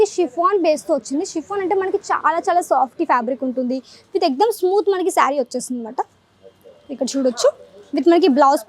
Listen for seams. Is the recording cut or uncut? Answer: uncut